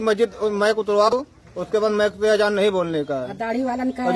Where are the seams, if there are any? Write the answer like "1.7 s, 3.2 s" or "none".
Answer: 1.1 s